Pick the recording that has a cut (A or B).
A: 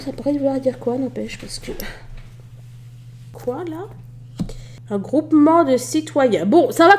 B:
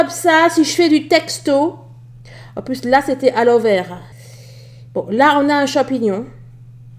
A